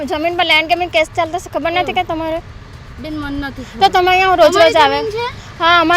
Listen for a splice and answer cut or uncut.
uncut